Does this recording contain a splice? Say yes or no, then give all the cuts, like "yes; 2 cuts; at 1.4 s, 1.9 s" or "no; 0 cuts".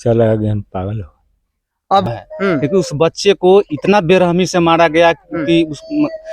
yes; 1 cut; at 2.2 s